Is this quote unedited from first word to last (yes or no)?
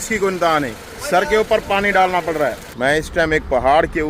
no